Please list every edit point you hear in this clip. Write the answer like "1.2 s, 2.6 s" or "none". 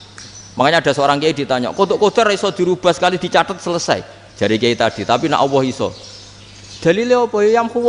none